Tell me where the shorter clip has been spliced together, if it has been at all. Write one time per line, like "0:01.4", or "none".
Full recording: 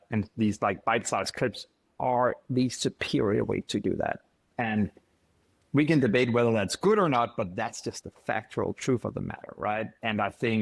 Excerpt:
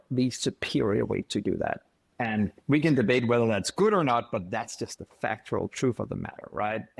0:02.6